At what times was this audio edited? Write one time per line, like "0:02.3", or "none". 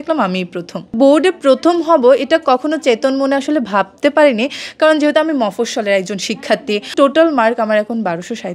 0:00.9
0:06.9